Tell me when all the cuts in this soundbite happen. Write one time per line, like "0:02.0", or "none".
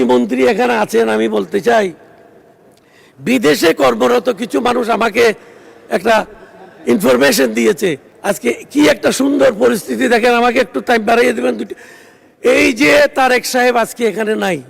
0:08.1